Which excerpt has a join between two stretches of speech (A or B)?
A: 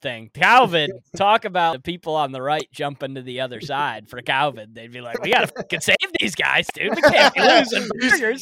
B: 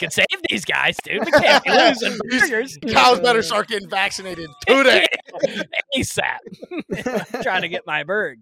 A